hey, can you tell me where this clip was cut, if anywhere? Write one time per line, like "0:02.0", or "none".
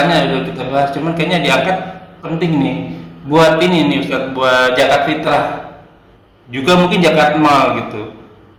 none